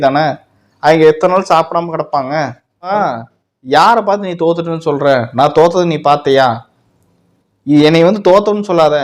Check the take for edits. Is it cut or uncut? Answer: cut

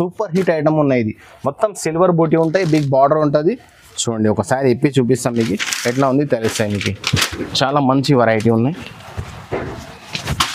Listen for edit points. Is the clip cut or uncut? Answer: uncut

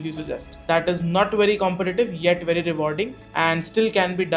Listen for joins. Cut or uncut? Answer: uncut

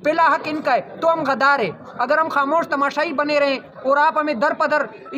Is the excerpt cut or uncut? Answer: uncut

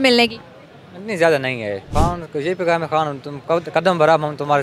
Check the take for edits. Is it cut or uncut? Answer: cut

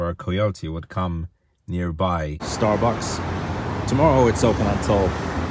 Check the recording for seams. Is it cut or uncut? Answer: cut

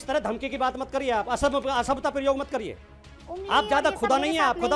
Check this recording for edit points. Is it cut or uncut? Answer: uncut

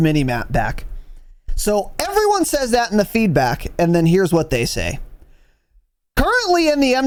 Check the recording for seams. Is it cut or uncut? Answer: uncut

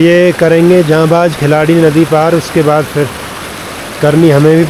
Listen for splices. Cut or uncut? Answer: uncut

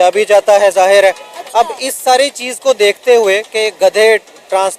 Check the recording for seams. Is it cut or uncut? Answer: uncut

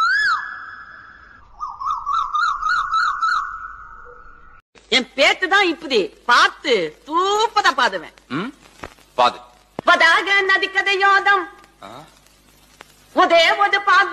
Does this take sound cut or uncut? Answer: cut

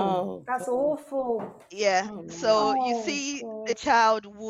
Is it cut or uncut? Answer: uncut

